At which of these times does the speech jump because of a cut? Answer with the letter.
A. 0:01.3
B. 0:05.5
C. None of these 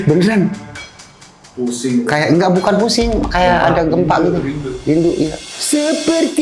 B